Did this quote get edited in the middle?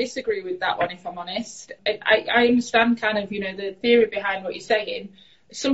yes; 2 cuts; at 1.7 s, 3.8 s

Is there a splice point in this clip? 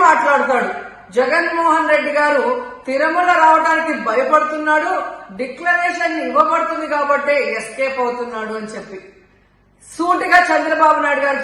no; 0 cuts

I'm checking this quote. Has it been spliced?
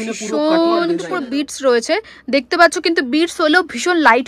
yes; 1 cut; at 1.1 s

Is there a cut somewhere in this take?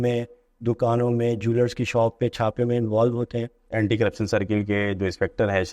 yes; 1 cut; at 3.7 s

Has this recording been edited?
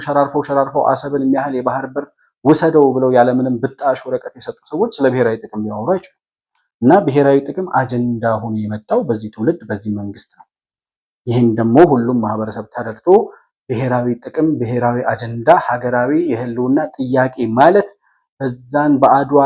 no; 0 cuts

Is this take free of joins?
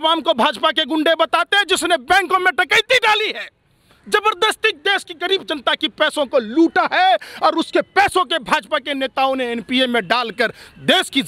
yes; 0 cuts

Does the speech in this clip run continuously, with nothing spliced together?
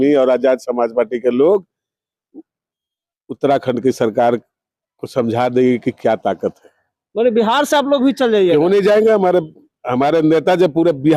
yes; 0 cuts

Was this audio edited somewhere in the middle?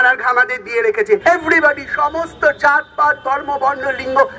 yes; 1 cut; at 1.2 s

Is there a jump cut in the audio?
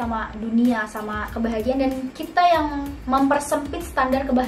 no; 0 cuts

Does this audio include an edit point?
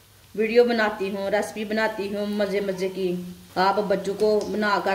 yes; 1 cut; at 3.4 s

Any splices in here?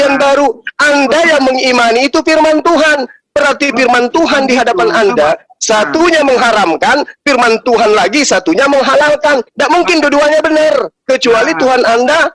no; 0 cuts

